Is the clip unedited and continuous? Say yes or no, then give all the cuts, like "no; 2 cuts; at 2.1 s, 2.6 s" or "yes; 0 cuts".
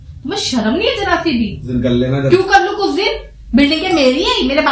no; 1 cut; at 1.7 s